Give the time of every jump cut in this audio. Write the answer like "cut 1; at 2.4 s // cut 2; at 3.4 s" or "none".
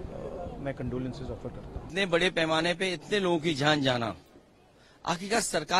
cut 1; at 1.9 s